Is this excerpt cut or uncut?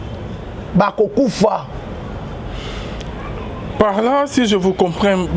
uncut